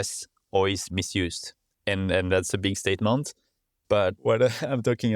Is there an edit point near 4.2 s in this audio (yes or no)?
yes